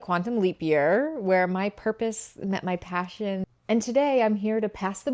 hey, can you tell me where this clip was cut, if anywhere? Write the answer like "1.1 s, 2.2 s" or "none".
3.4 s